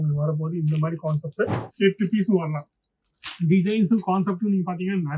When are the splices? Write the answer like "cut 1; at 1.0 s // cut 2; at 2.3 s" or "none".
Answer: cut 1; at 1.6 s